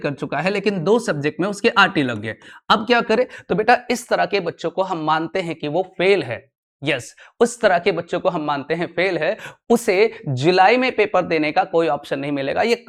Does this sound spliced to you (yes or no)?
no